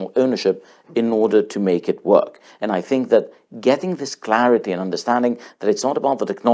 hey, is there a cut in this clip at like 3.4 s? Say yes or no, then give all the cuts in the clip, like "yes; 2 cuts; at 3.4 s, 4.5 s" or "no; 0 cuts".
no; 0 cuts